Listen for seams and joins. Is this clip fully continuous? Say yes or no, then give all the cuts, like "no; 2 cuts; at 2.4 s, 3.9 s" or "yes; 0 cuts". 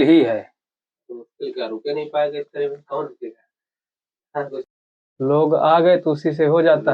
no; 1 cut; at 4.7 s